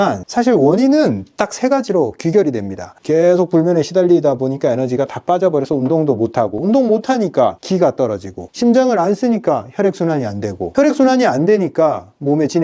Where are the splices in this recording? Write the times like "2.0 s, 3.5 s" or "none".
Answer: 2.9 s